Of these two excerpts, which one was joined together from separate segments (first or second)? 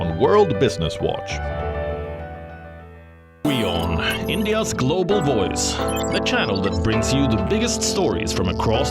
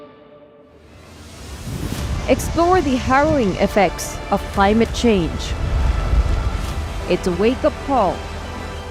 first